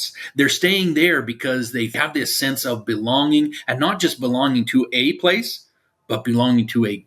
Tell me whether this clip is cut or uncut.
cut